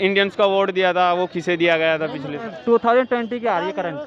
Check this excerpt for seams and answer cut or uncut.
cut